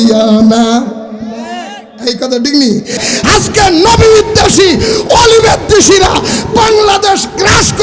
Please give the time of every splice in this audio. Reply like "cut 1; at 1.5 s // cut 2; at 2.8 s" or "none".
cut 1; at 3.0 s